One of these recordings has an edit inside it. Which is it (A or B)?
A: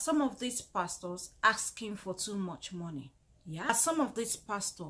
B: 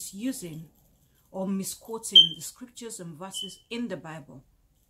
A